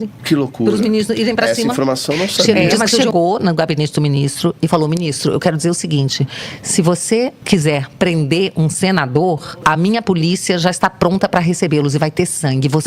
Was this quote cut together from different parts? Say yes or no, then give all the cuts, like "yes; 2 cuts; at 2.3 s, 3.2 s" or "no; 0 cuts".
yes; 1 cut; at 3.0 s